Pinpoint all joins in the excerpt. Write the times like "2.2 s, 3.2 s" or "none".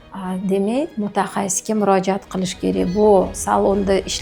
none